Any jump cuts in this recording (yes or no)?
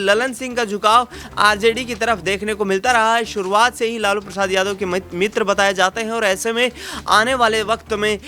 no